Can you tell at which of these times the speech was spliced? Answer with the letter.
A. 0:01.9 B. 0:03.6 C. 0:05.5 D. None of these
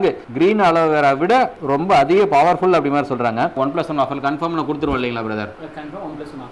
B